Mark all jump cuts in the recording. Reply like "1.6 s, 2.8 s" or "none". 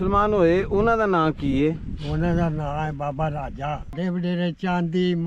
3.9 s